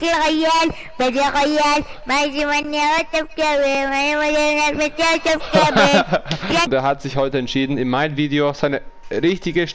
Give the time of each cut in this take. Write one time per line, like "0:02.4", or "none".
0:06.7